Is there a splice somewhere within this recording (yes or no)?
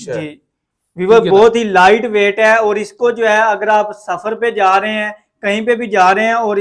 no